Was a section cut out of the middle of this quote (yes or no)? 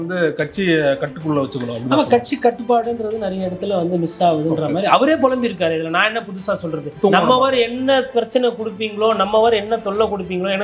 yes